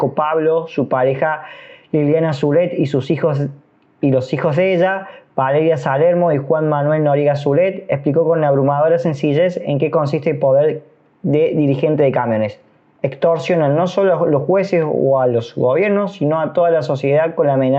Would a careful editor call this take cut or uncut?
uncut